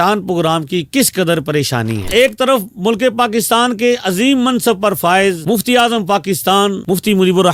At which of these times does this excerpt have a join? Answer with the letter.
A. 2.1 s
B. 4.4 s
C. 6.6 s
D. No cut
A